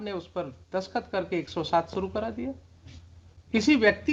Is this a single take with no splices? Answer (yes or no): yes